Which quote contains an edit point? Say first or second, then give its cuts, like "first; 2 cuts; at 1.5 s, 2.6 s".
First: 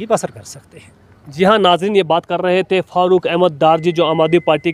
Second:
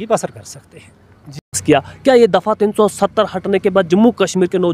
second; 1 cut; at 1.5 s